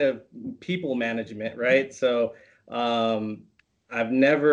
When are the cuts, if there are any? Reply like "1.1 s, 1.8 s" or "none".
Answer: none